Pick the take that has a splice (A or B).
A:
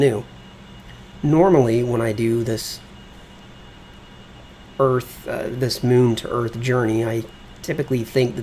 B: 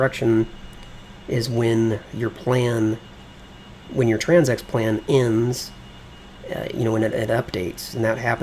A